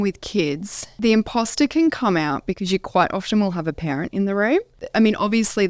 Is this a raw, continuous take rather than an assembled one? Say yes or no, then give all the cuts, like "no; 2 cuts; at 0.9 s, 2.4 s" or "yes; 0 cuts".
no; 2 cuts; at 0.9 s, 4.8 s